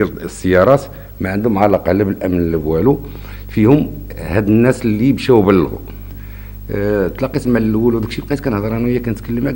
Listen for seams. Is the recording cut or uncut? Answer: uncut